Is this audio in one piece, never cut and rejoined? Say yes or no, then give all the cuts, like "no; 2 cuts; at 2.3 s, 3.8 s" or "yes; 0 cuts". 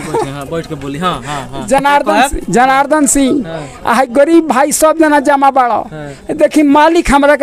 yes; 0 cuts